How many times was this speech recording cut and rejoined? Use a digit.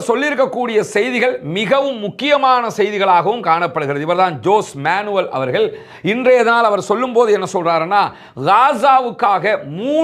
0